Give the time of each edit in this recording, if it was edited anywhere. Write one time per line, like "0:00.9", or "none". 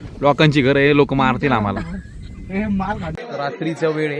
0:03.1